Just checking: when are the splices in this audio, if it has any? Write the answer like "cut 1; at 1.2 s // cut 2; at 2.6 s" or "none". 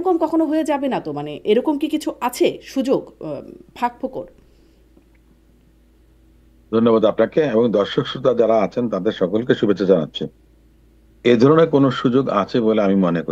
none